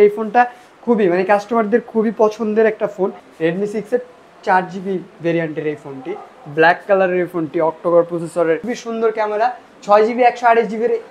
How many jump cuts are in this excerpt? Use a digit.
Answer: 2